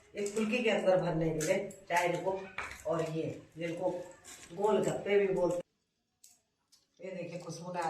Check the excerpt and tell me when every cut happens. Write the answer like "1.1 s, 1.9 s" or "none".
5.6 s

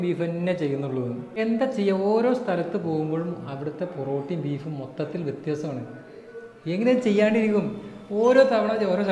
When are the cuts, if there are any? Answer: 1.4 s

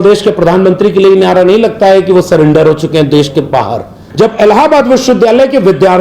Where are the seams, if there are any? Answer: 4.0 s

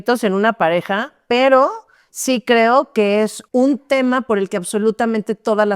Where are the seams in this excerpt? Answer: 3.4 s

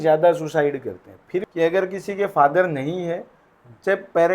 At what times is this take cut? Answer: 1.5 s

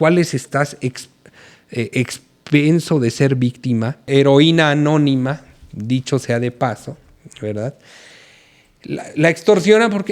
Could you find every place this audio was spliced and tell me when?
4.0 s

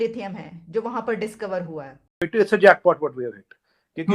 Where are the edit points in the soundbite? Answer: 2.3 s

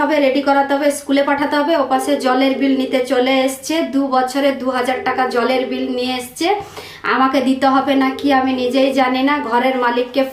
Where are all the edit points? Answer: none

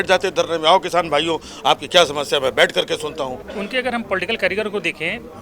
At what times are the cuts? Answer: 3.4 s

